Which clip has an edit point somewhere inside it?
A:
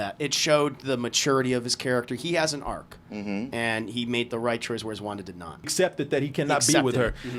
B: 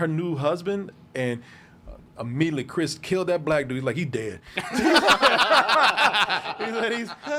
A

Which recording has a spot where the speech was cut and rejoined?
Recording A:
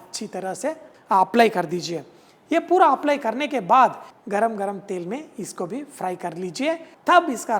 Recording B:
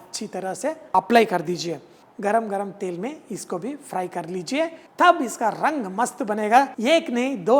B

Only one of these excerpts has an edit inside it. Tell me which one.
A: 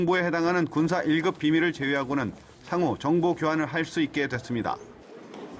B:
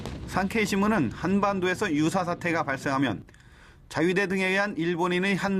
A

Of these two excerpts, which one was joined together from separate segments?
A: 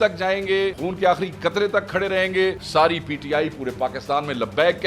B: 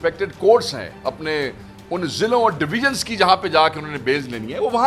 A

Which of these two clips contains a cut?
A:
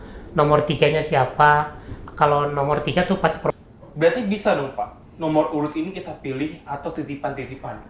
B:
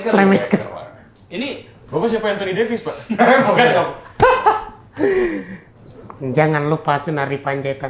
A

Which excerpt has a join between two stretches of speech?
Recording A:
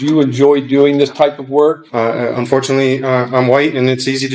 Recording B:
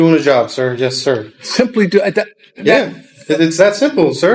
A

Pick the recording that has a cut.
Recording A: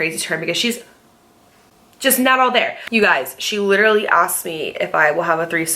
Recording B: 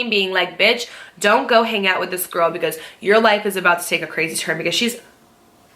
A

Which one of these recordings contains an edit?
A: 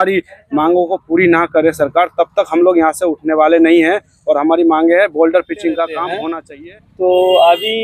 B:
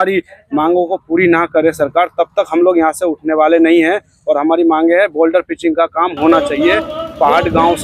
A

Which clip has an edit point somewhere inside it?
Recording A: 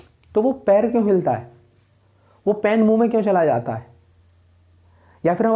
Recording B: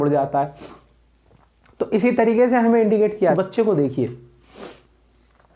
B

